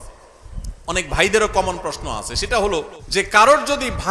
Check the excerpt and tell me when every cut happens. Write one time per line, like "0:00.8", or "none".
0:03.0

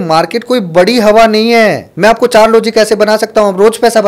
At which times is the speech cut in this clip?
0:01.9

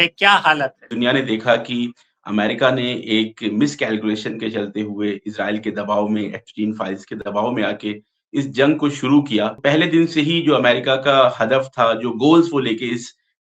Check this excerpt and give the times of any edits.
0:00.9
0:09.6

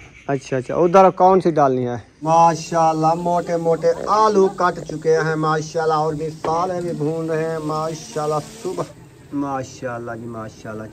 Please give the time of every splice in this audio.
0:02.1
0:08.9

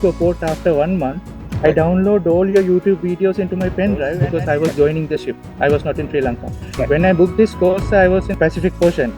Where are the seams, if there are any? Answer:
0:04.2

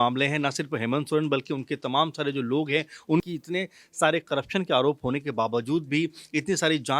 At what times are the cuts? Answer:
0:03.3

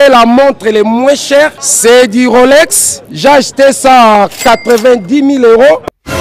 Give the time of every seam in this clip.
none

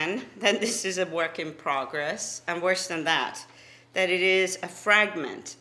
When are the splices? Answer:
none

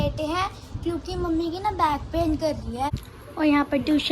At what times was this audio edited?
0:02.9

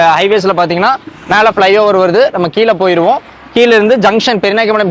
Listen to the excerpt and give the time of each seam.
none

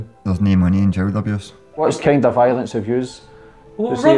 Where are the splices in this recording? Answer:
0:01.8

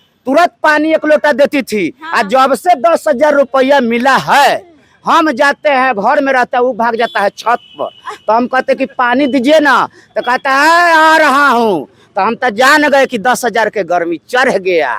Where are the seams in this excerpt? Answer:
none

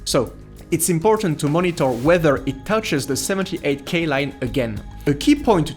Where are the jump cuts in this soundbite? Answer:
0:04.9

